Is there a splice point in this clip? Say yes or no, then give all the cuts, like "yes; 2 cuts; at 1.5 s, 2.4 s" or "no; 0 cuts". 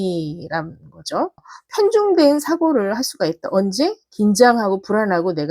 yes; 1 cut; at 1.5 s